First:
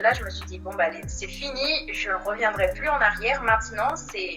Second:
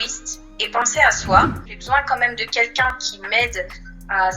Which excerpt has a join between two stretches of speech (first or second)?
second